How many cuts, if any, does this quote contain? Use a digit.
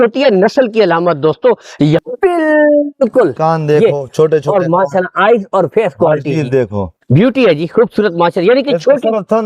1